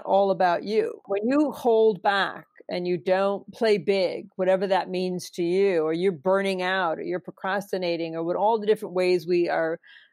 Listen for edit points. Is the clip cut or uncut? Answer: cut